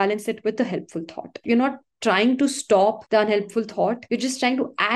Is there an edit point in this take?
yes; 3 cuts; at 1.3 s, 3.0 s, 4.0 s

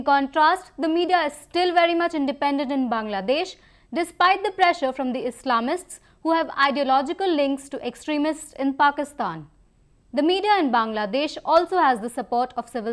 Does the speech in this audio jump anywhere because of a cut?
yes; 1 cut; at 10.7 s

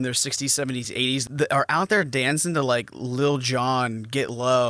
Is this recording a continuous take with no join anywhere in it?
no; 1 cut; at 1.3 s

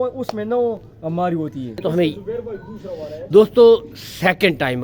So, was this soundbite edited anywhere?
yes; 1 cut; at 1.8 s

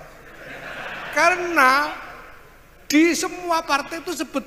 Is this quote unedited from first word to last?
yes; 0 cuts

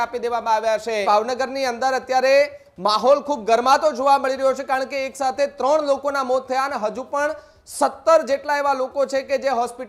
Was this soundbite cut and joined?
yes; 1 cut; at 1.0 s

